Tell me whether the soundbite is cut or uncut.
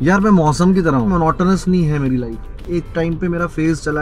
cut